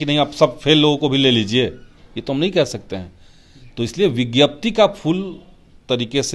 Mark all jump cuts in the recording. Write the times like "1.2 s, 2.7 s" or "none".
none

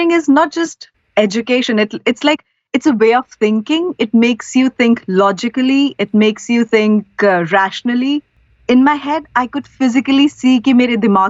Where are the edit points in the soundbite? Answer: 8.3 s

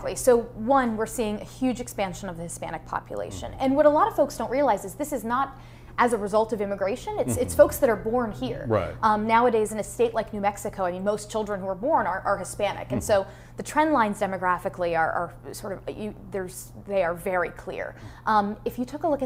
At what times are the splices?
none

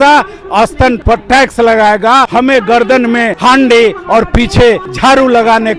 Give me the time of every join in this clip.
1.0 s, 2.3 s, 3.3 s, 4.9 s

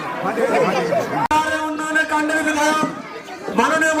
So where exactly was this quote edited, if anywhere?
none

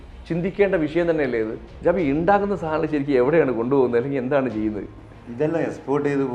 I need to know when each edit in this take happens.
1.6 s

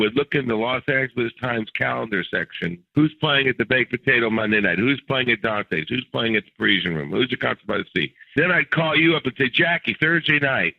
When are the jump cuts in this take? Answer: 2.8 s, 8.2 s

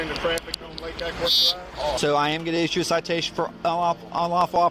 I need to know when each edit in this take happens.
2.0 s

